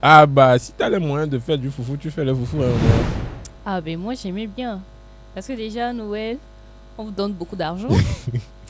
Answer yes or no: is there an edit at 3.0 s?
yes